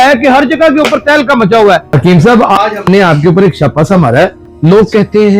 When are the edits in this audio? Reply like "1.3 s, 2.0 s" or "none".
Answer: 1.9 s, 4.4 s